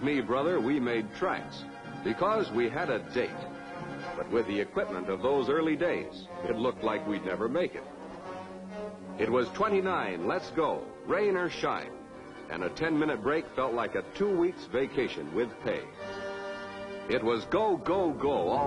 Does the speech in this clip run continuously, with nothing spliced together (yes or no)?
no